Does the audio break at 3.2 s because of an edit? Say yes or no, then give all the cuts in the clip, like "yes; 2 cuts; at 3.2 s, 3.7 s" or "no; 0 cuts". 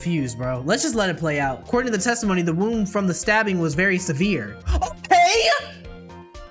no; 1 cut; at 1.6 s